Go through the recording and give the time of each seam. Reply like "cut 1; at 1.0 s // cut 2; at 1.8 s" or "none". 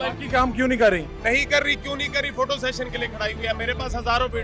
none